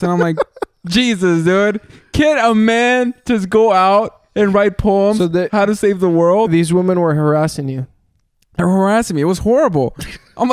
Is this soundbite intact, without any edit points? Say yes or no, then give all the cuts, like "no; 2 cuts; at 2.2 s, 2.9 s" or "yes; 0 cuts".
yes; 0 cuts